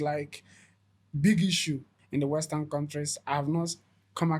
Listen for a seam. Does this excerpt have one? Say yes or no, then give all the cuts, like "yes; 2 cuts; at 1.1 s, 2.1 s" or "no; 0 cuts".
yes; 1 cut; at 1.9 s